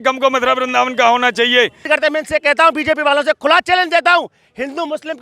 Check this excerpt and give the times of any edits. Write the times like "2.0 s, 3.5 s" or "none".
1.8 s